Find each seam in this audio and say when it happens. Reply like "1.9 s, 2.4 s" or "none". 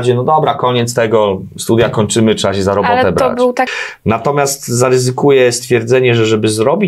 3.8 s